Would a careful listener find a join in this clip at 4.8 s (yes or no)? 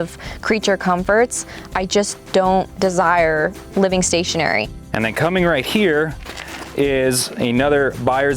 yes